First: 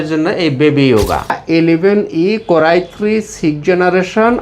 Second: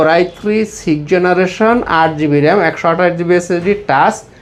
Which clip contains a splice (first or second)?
first